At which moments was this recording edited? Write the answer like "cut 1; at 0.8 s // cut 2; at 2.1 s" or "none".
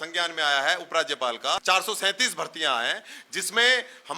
cut 1; at 1.6 s